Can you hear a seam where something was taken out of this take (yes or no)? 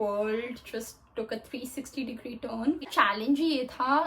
yes